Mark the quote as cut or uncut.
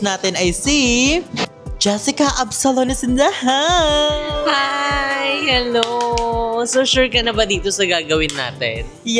cut